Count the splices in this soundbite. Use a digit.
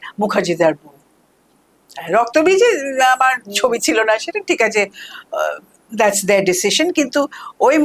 0